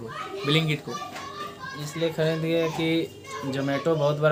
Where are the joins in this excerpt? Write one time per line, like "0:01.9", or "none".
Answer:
none